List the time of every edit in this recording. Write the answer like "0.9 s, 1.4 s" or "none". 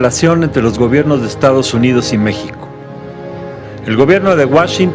4.0 s